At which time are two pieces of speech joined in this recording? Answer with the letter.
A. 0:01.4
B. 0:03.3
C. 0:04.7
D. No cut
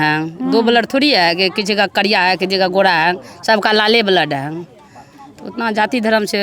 D